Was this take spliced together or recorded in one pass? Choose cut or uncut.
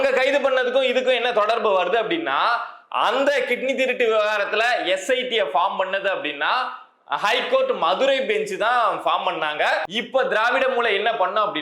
cut